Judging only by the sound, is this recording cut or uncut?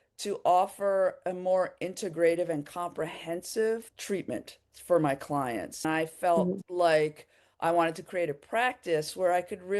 cut